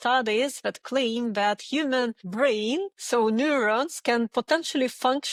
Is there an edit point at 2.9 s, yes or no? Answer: no